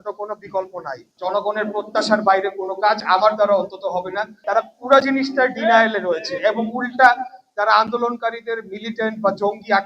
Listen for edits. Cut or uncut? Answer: cut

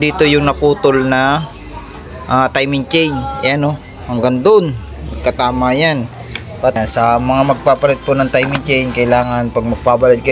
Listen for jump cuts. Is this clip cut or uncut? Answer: cut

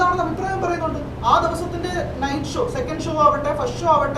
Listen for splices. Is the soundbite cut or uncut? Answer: uncut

